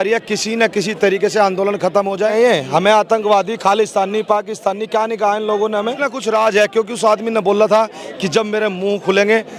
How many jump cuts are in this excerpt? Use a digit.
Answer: 2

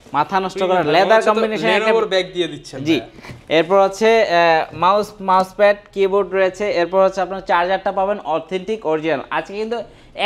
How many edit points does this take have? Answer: 0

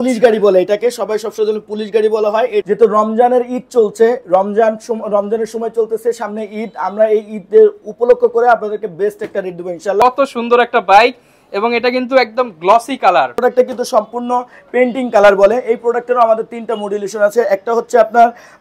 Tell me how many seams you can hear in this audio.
3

